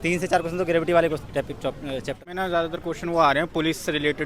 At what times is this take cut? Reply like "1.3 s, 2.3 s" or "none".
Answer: 2.2 s